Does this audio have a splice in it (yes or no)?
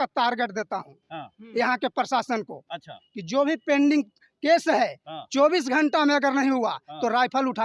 no